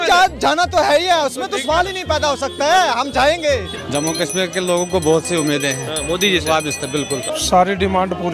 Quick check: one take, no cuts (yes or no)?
no